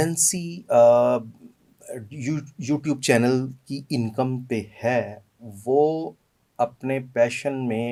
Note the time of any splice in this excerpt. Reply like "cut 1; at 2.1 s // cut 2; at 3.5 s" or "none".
none